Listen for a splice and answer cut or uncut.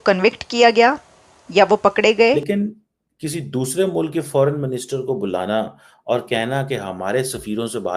cut